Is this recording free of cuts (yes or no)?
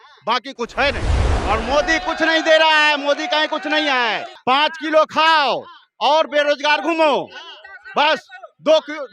no